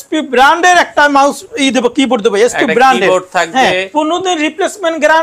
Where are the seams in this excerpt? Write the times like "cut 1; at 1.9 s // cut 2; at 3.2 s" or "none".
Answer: cut 1; at 3.9 s